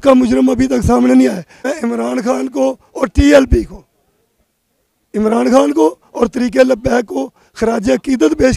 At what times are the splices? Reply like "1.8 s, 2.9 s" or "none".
1.5 s